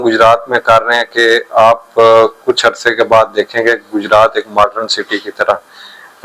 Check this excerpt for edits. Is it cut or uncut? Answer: uncut